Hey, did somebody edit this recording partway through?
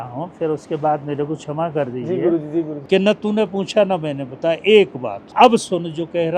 yes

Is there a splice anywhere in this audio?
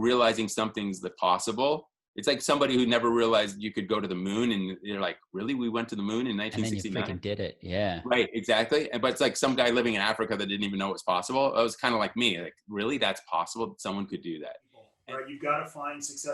yes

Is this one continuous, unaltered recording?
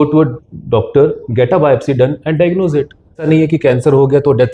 no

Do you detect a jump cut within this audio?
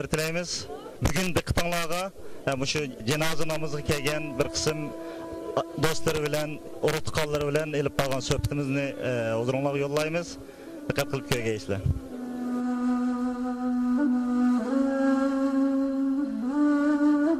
no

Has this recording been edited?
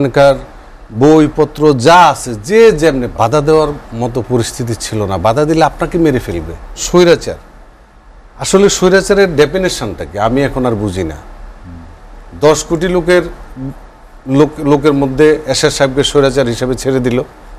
yes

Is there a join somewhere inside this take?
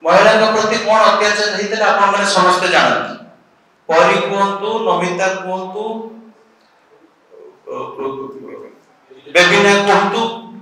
no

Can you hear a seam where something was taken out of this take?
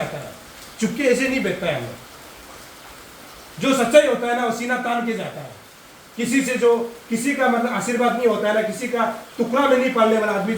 no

